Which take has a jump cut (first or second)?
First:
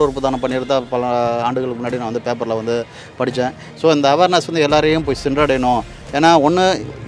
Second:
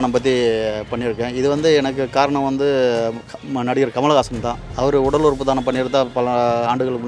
first